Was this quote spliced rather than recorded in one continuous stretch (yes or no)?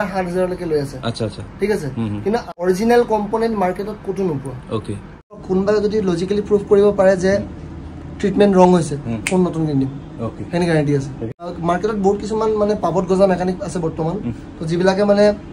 yes